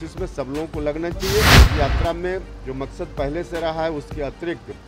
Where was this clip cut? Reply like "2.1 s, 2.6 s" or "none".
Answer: 1.6 s